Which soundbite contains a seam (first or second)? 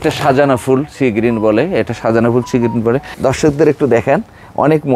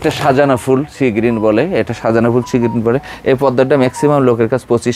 first